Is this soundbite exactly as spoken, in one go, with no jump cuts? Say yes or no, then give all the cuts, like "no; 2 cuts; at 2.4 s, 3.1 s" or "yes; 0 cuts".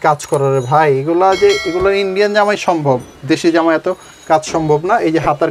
yes; 0 cuts